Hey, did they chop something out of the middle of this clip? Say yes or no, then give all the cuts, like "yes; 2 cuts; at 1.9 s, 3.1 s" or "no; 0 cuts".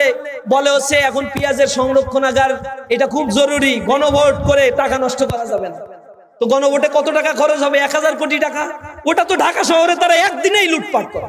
no; 0 cuts